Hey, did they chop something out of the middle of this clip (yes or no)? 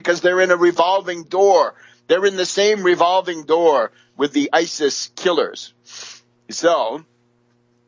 yes